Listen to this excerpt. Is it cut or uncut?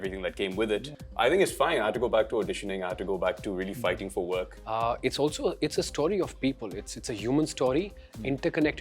cut